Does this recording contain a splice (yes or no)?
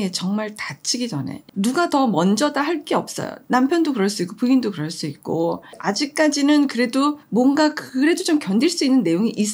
no